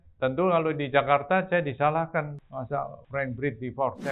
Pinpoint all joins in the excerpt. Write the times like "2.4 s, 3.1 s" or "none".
none